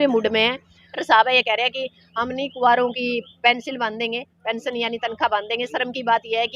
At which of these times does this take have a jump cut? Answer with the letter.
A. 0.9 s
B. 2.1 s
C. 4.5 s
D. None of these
A